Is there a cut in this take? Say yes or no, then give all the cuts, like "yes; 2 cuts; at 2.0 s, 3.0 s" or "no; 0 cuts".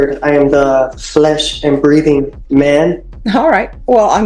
yes; 1 cut; at 3.1 s